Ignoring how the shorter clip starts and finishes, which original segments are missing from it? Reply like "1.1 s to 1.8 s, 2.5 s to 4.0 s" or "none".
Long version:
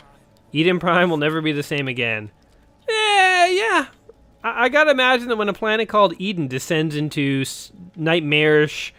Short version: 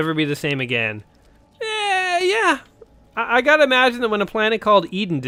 none